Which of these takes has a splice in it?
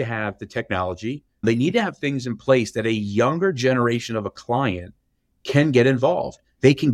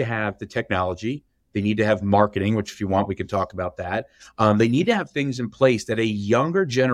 first; 1 cut; at 1.4 s

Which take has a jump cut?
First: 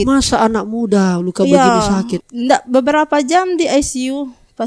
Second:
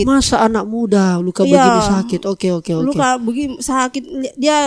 first; 1 cut; at 2.2 s

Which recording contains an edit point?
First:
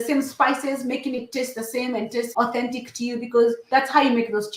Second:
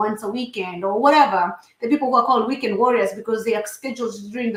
first; 2 cuts; at 2.3 s, 3.6 s

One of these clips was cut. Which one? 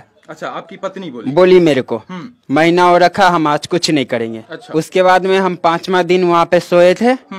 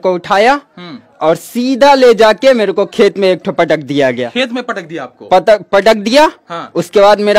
first; 1 cut; at 4.6 s

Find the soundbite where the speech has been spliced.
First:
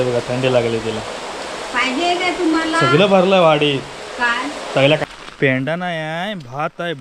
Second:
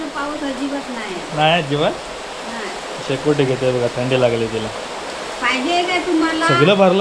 first; 1 cut; at 5.0 s

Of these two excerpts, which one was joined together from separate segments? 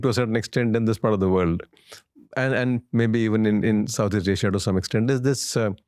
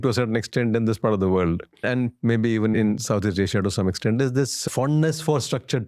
second; 3 cuts; at 1.8 s, 2.7 s, 4.6 s

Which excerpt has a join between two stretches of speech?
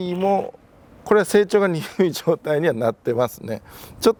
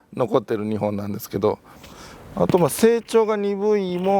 second; 1 cut; at 1.8 s

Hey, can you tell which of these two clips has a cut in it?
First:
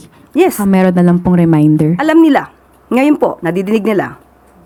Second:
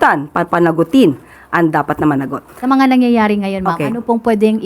second; 1 cut; at 2.4 s

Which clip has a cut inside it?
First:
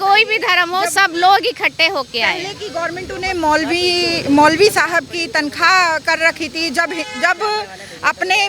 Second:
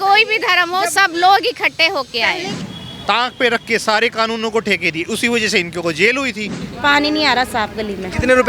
second; 2 cuts; at 2.6 s, 6.6 s

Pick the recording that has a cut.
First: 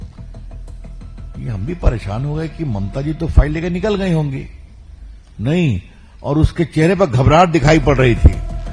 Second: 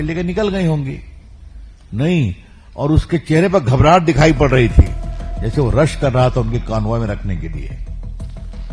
second; 1 cut; at 7.7 s

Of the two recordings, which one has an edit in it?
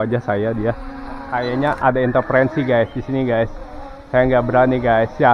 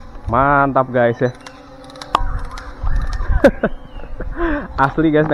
first; 1 cut; at 1.3 s

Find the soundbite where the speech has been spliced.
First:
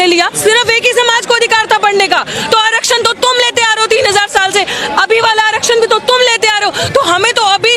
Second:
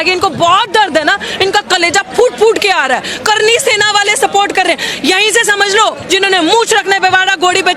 second; 1 cut; at 6.0 s

